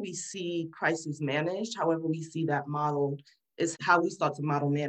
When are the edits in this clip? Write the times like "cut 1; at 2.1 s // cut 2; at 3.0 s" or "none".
none